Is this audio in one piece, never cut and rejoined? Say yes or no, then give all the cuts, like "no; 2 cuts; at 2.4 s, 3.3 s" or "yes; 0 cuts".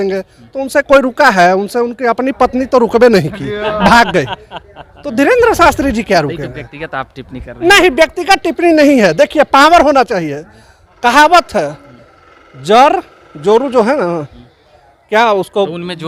yes; 0 cuts